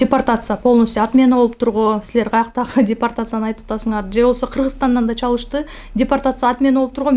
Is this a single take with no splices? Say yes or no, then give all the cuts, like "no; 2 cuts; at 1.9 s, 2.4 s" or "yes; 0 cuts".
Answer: yes; 0 cuts